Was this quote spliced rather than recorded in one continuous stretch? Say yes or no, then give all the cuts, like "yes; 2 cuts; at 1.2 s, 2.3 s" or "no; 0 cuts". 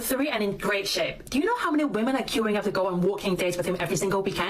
yes; 1 cut; at 1.6 s